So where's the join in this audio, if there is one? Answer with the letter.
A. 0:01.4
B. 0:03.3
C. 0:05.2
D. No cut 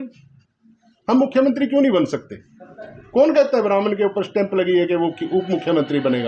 D